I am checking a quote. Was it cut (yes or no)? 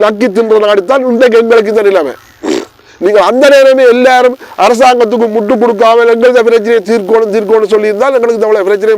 no